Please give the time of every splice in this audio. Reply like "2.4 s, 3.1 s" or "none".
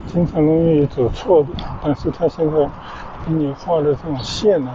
none